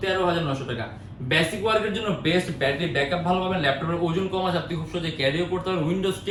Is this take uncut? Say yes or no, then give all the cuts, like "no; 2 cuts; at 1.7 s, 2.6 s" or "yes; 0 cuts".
yes; 0 cuts